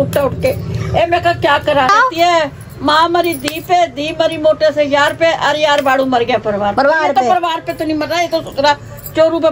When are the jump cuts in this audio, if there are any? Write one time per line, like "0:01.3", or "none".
0:01.9

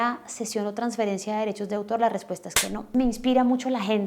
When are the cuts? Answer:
0:02.9

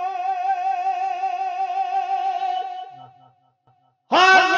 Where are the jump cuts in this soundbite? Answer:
none

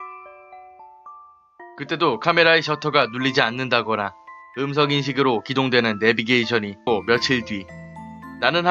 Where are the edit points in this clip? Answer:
none

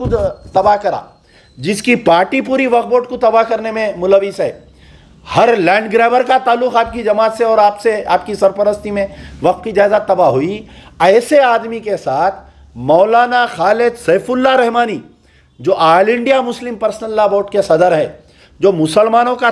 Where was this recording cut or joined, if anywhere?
none

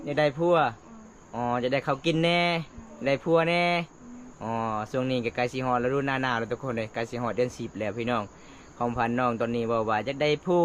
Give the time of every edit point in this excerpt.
none

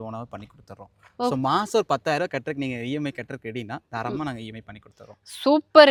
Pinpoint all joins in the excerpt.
none

